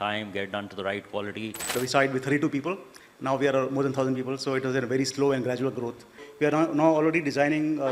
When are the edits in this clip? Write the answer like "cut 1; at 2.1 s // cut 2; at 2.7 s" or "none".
cut 1; at 1.7 s // cut 2; at 6.2 s